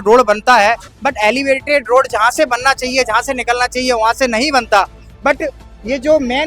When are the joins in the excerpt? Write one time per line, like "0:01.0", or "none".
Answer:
none